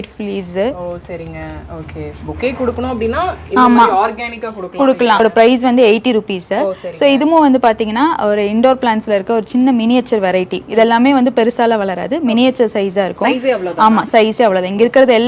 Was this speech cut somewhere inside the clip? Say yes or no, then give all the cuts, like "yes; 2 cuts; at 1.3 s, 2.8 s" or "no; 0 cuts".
yes; 1 cut; at 5.2 s